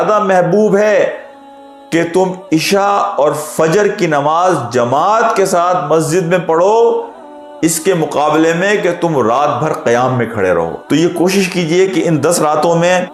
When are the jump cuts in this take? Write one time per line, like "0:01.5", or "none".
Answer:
none